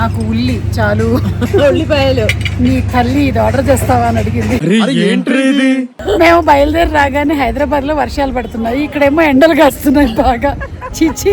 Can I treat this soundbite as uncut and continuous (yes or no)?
no